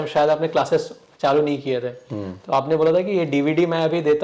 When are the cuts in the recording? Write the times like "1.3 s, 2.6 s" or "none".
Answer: none